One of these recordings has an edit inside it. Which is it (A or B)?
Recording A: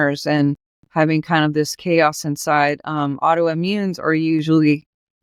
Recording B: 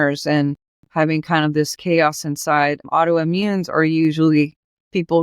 B